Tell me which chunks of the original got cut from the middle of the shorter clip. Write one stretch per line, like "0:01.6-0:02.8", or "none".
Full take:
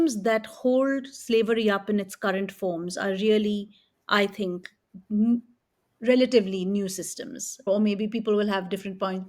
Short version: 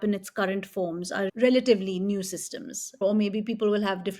0:03.2-0:06.0